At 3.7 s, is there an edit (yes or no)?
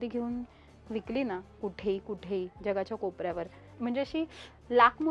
yes